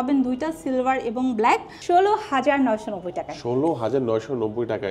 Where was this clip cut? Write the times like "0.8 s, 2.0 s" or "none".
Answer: 1.7 s